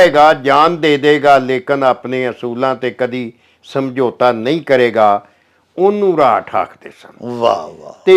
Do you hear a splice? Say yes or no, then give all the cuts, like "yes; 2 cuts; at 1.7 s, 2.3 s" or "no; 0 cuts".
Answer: no; 0 cuts